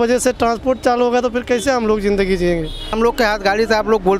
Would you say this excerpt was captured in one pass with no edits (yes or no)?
no